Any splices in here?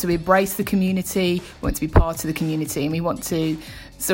no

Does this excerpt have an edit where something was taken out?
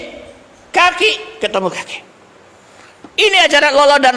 no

